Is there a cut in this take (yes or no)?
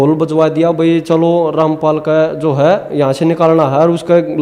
no